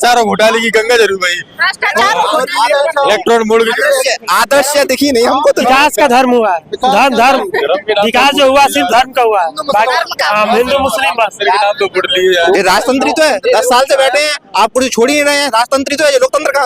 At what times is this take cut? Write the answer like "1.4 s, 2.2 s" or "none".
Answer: 5.6 s, 12.5 s